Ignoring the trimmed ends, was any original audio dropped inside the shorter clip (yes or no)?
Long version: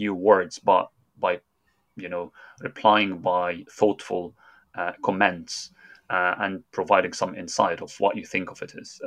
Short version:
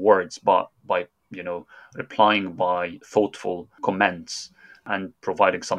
yes